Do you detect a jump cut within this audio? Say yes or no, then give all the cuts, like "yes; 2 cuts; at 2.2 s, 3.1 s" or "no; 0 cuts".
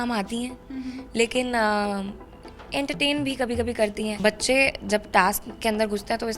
yes; 1 cut; at 4.2 s